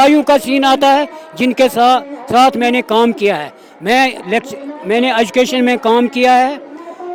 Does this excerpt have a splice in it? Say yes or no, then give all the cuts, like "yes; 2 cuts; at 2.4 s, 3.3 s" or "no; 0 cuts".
no; 0 cuts